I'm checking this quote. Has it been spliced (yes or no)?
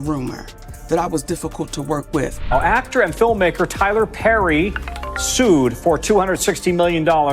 yes